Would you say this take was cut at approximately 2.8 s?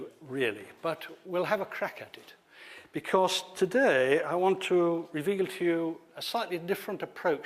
yes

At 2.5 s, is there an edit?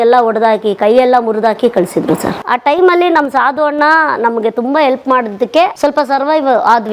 yes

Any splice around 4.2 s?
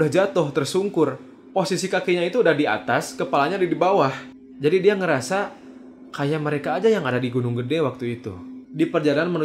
yes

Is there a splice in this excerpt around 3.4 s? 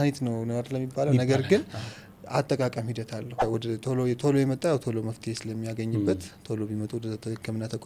yes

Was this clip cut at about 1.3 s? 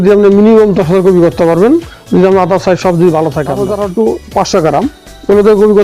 no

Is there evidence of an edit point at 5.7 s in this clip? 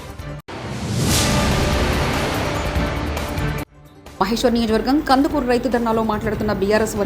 no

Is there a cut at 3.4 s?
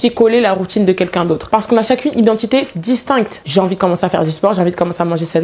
yes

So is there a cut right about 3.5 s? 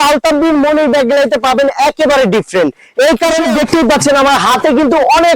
yes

